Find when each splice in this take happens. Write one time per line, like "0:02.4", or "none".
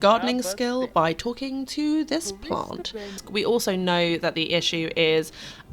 0:03.2